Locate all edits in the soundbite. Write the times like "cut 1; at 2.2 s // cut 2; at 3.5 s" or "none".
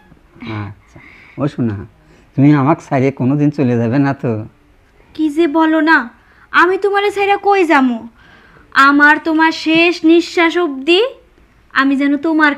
none